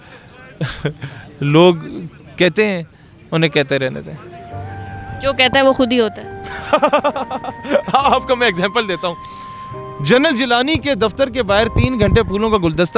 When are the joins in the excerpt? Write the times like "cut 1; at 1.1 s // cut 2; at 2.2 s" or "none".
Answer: none